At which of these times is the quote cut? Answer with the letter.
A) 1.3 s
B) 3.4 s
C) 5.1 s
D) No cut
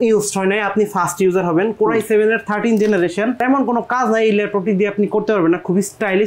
B